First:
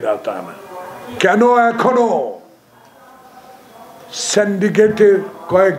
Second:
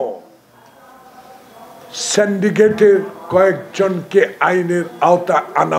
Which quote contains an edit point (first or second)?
first